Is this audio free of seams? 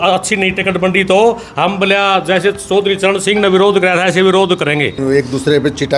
no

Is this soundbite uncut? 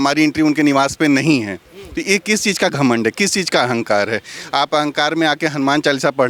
yes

